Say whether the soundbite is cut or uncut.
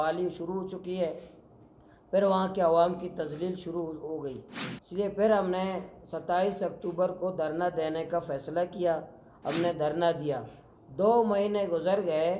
uncut